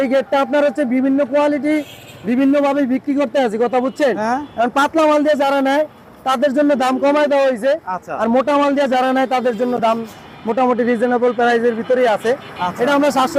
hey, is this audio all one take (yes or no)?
yes